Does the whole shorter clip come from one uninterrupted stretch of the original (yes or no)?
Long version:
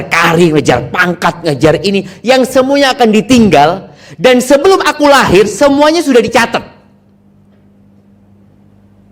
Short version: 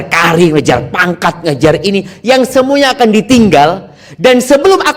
yes